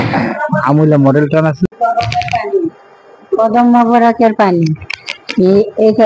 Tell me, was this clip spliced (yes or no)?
yes